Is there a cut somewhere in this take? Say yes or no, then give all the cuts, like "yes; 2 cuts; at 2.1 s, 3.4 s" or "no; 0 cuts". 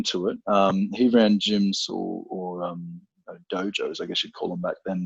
no; 0 cuts